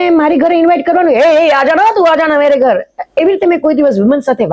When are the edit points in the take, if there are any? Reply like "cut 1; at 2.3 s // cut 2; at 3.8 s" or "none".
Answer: none